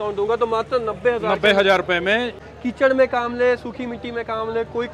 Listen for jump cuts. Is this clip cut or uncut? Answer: cut